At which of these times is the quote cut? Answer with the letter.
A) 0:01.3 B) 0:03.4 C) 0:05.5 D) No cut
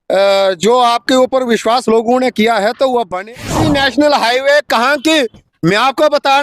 B